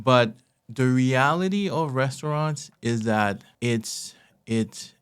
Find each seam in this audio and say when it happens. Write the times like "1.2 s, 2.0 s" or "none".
3.5 s